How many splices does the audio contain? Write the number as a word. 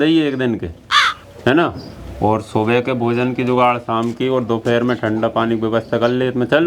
zero